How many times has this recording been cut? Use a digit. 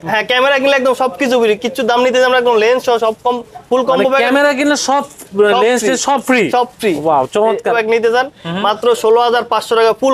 1